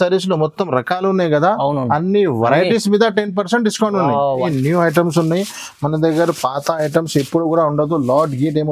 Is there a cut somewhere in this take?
yes; 1 cut; at 4.4 s

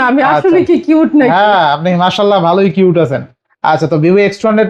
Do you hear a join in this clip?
no; 0 cuts

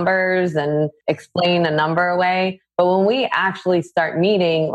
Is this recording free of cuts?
no; 1 cut; at 1.0 s

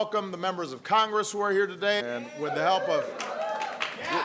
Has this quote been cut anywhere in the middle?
no; 0 cuts

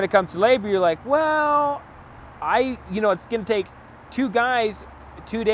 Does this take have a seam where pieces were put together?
no; 0 cuts

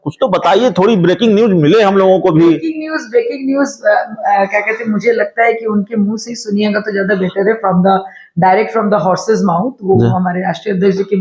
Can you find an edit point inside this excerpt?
no; 0 cuts

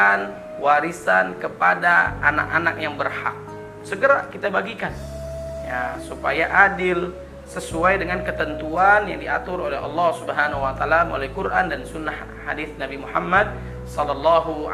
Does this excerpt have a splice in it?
no; 0 cuts

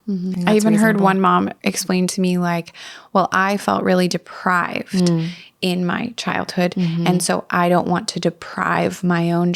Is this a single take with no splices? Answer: no; 1 cut; at 1.5 s

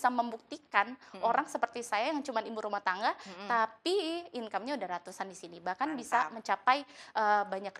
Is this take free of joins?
yes; 0 cuts

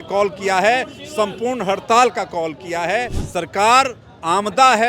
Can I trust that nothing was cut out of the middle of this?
no; 1 cut; at 3.2 s

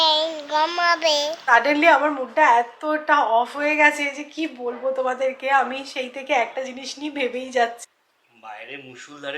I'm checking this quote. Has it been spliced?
yes; 2 cuts; at 1.4 s, 7.8 s

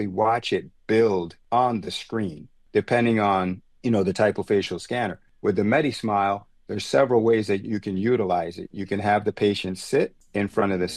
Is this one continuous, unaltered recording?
no; 1 cut; at 1.4 s

